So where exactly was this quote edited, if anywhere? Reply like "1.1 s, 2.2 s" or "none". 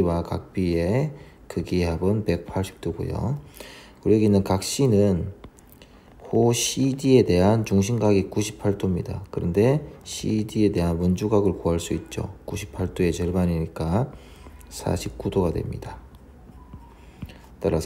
none